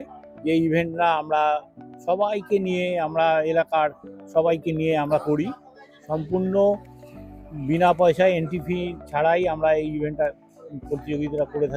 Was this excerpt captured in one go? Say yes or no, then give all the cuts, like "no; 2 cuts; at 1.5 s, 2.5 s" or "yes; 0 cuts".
yes; 0 cuts